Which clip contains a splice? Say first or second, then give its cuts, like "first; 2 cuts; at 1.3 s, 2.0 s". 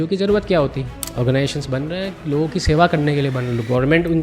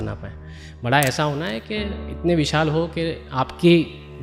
first; 1 cut; at 1.0 s